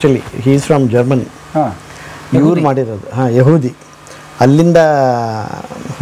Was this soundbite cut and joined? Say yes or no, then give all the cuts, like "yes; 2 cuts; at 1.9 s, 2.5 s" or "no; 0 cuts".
no; 0 cuts